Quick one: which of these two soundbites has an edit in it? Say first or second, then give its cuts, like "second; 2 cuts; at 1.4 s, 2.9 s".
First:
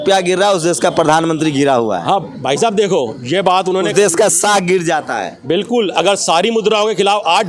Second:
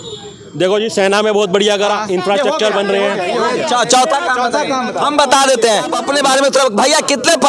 second; 1 cut; at 6.0 s